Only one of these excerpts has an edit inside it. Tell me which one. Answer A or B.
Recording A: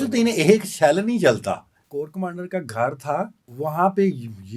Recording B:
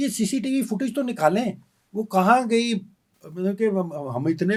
A